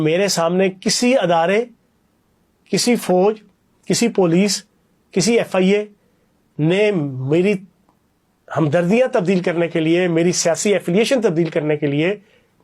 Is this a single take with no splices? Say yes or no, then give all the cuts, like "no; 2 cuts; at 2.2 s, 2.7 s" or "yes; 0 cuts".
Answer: yes; 0 cuts